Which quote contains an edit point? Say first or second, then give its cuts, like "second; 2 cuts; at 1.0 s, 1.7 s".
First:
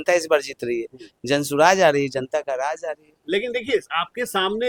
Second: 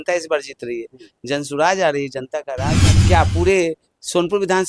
second; 1 cut; at 2.9 s